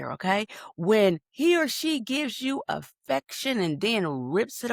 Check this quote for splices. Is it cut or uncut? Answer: uncut